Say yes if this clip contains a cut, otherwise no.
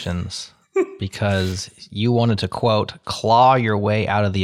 no